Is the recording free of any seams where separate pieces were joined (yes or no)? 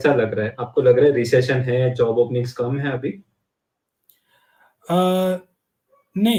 yes